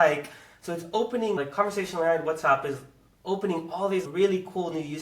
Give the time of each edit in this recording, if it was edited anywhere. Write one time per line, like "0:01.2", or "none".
0:04.1